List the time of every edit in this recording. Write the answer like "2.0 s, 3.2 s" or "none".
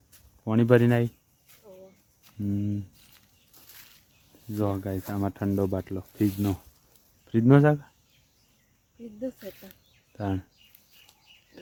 none

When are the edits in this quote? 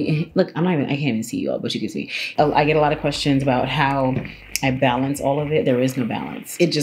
2.3 s

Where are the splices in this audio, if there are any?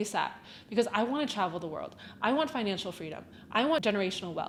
none

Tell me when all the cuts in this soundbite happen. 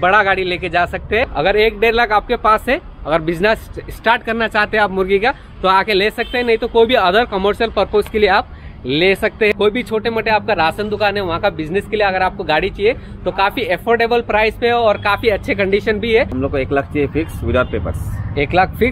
1.3 s, 9.5 s, 16.3 s

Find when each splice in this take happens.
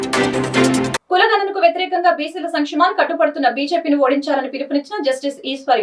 none

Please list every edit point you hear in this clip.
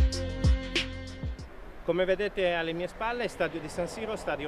1.2 s

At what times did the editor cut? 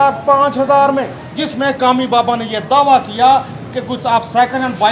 1.2 s

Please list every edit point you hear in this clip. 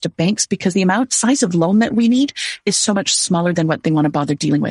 none

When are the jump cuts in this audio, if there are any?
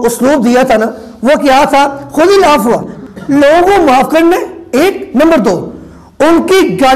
2.9 s

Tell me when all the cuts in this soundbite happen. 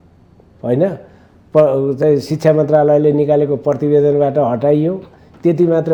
none

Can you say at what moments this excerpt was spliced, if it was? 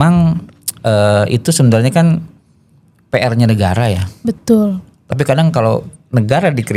none

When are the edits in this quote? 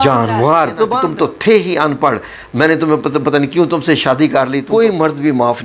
1.0 s, 4.6 s

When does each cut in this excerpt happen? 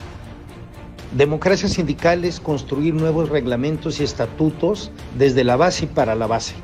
0.9 s

